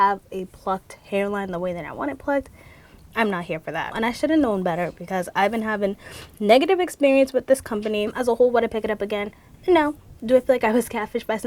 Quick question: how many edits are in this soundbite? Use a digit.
2